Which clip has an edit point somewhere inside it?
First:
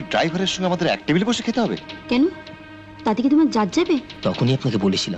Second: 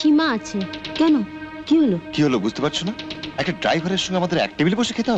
first; 1 cut; at 4.1 s

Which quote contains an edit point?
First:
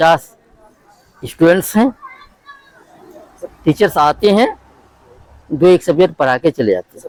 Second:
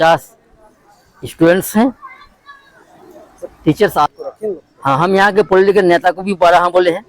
second; 1 cut; at 4.1 s

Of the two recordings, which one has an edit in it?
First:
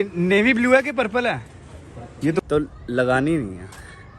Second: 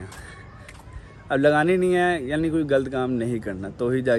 first; 1 cut; at 2.4 s

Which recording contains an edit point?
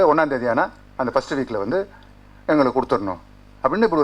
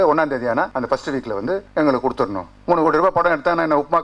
second; 2 cuts; at 1.1 s, 2.5 s

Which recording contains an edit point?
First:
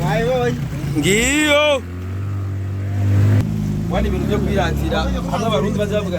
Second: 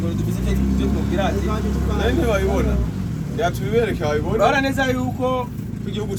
first; 1 cut; at 3.4 s

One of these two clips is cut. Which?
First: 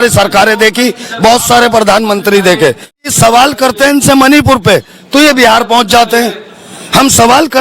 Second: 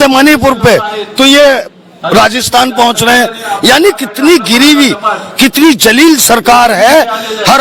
first; 1 cut; at 3.0 s

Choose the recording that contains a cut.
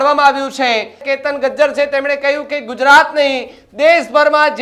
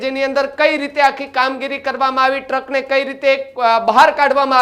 first; 1 cut; at 1.1 s

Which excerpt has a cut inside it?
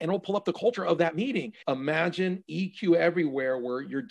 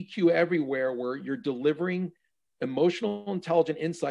first; 1 cut; at 1.5 s

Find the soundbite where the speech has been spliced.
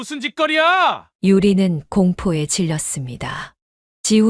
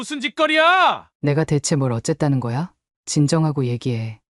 second; 1 cut; at 1.1 s

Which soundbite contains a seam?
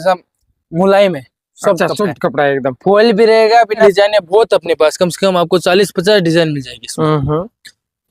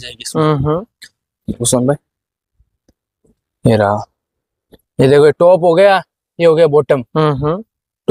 first; 1 cut; at 3.8 s

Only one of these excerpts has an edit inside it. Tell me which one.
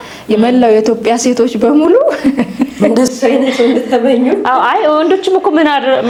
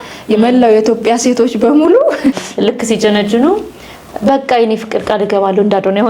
second; 1 cut; at 2.4 s

